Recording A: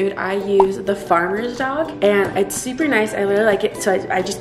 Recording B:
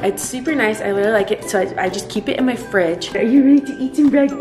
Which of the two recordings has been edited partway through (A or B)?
B